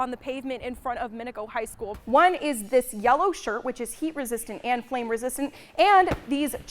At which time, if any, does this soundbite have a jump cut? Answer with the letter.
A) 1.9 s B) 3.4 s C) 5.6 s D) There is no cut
A